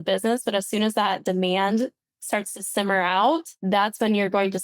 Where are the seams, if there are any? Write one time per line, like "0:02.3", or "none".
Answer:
0:03.5